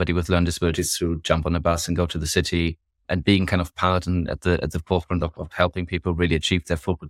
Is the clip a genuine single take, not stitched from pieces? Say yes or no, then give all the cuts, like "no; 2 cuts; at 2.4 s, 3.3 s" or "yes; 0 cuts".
yes; 0 cuts